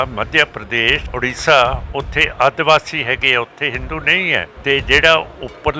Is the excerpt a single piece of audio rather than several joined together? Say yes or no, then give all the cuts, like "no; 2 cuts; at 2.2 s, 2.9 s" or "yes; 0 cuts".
no; 2 cuts; at 1.1 s, 4.5 s